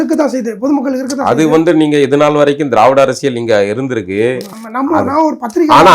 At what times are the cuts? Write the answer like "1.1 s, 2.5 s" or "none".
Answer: 4.5 s